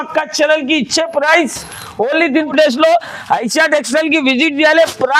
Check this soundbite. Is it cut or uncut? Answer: cut